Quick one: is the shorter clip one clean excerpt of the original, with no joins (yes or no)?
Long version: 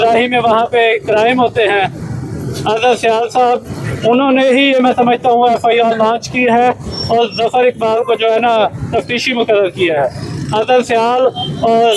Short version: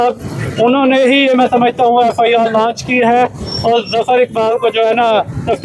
yes